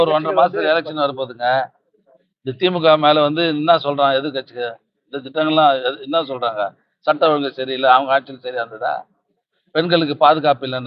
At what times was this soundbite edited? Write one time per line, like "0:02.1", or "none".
none

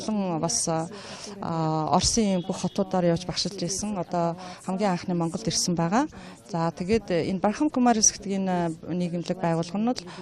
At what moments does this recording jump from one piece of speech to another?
0:09.2

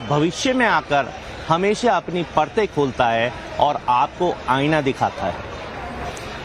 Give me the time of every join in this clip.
0:05.5

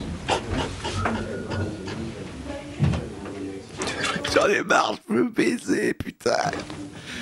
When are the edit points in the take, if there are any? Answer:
none

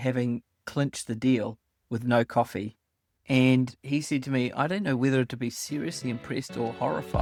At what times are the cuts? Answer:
none

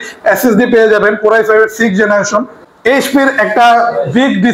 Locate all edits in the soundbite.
0:02.6

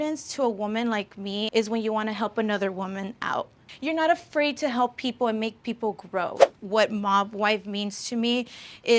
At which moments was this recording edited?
0:01.5
0:03.7
0:06.5

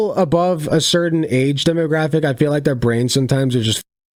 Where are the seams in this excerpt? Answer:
none

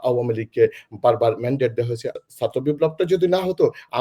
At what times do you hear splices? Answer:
0:02.1

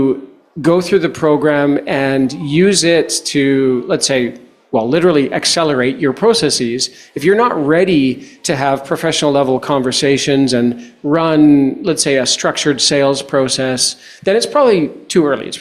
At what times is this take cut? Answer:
none

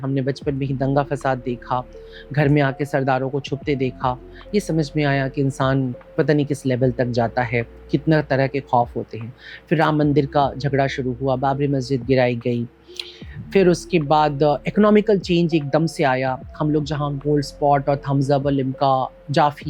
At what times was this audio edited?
none

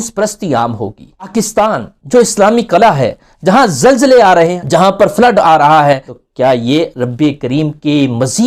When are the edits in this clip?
0:01.3
0:04.5
0:06.1

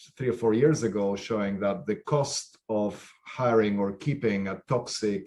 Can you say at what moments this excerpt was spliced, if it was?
none

